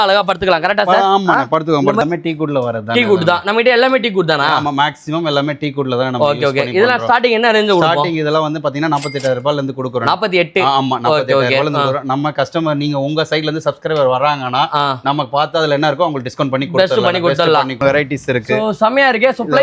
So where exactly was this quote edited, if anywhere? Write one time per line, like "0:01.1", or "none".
0:02.0
0:17.8